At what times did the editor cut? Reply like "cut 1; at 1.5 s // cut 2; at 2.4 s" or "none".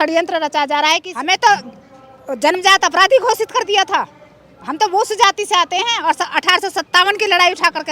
cut 1; at 1.1 s